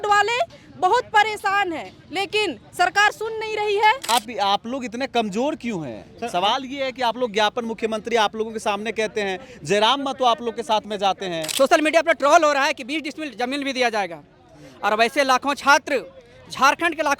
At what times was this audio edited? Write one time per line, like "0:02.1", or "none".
0:04.1
0:11.4